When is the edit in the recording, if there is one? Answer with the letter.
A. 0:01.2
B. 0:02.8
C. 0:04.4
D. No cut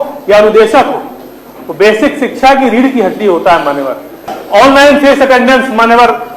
C